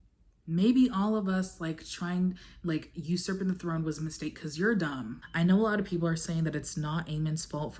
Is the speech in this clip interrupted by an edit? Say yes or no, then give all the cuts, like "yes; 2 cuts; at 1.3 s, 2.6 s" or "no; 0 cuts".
yes; 1 cut; at 5.2 s